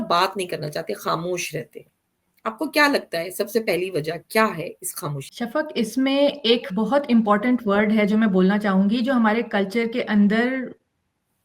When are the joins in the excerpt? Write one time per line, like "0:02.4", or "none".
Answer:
0:05.2